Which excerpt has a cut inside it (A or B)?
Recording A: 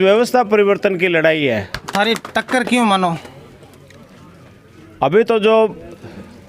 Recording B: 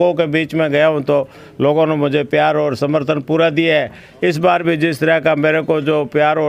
A